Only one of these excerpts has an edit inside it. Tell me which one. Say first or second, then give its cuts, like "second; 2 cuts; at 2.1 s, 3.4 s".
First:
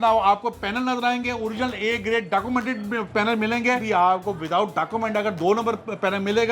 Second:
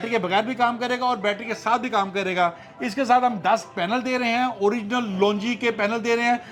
first; 1 cut; at 3.8 s